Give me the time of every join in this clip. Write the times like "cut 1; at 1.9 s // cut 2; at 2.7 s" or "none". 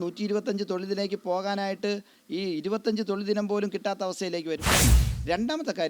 cut 1; at 4.8 s